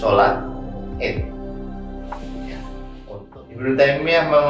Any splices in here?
yes; 1 cut; at 3.1 s

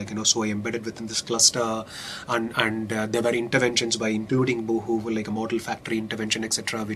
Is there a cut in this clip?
no; 0 cuts

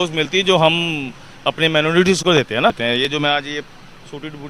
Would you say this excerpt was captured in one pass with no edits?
no; 1 cut; at 2.8 s

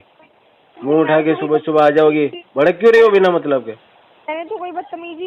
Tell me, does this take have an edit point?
no; 0 cuts

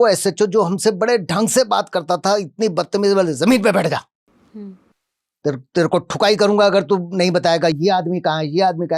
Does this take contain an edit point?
no; 0 cuts

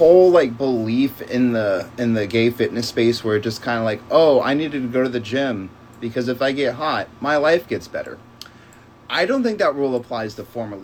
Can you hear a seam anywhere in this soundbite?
no; 0 cuts

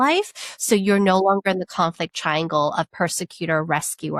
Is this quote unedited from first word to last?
yes; 0 cuts

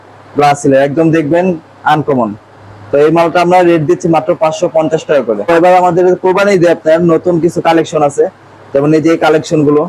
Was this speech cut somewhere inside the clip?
no; 0 cuts

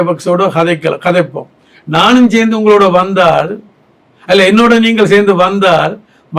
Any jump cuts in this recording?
no; 0 cuts

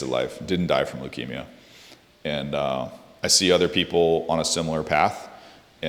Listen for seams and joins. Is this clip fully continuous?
yes; 0 cuts

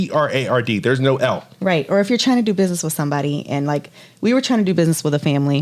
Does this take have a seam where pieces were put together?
no; 0 cuts

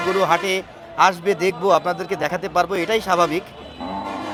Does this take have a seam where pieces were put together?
no; 0 cuts

